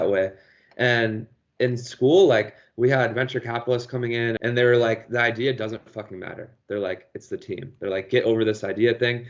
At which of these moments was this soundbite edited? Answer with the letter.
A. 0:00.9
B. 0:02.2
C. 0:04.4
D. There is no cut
C